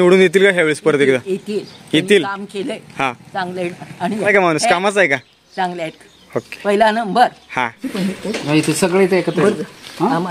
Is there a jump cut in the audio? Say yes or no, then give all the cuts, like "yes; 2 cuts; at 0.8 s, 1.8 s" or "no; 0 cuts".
no; 0 cuts